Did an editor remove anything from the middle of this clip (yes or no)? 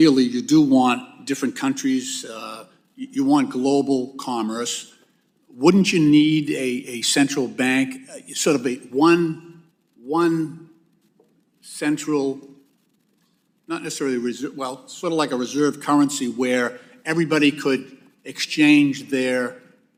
no